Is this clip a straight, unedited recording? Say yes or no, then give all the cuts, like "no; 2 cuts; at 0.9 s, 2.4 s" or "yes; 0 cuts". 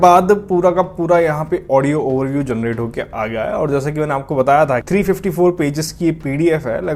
yes; 0 cuts